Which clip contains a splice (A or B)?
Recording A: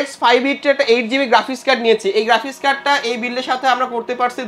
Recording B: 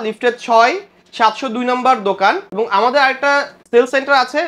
B